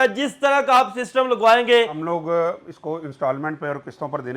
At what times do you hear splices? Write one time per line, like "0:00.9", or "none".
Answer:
0:02.0